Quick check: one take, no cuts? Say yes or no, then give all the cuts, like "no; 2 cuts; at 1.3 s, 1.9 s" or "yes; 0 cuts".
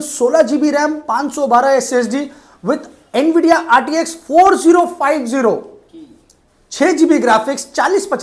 yes; 0 cuts